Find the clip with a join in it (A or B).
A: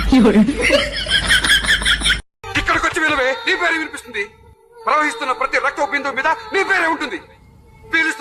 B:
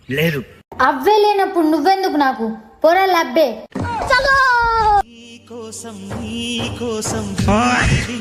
A